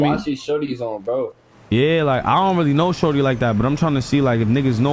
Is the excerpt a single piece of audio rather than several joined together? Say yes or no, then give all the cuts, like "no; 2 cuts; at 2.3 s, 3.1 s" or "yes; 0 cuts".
yes; 0 cuts